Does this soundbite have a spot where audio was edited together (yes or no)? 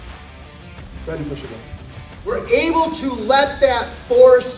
yes